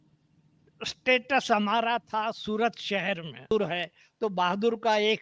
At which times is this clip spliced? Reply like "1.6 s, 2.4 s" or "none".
3.5 s